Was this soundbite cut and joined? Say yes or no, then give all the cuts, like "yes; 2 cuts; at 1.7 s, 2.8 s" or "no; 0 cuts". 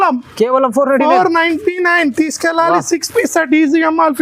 no; 0 cuts